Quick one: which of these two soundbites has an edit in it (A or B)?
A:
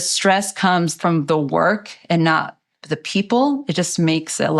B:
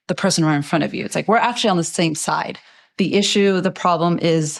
A